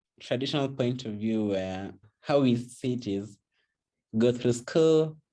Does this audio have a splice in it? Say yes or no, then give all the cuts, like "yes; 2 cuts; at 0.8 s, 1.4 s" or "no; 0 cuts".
yes; 1 cut; at 2.1 s